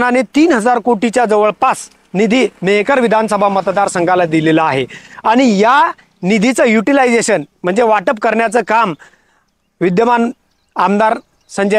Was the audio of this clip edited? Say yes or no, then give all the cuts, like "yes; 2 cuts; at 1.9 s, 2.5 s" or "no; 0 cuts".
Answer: no; 0 cuts